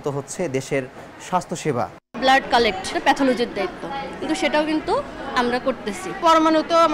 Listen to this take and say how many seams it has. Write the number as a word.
two